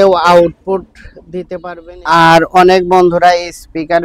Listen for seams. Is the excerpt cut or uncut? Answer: cut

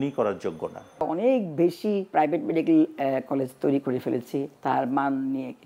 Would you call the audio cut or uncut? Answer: cut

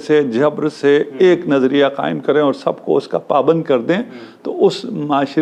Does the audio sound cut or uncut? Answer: uncut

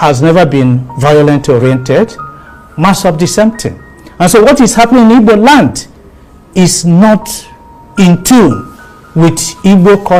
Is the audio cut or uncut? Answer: uncut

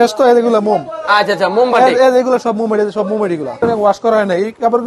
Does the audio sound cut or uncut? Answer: cut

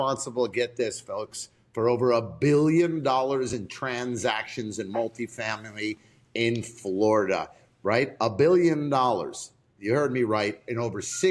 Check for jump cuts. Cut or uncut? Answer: uncut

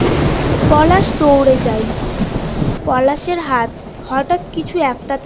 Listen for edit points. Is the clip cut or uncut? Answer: cut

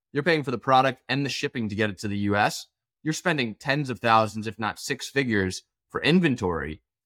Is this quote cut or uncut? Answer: uncut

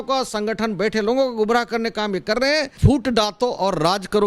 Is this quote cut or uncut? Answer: cut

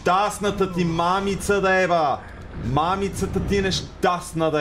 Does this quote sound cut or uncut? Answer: uncut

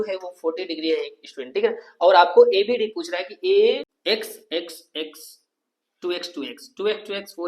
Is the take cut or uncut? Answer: cut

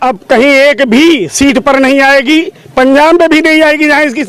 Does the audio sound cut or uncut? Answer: uncut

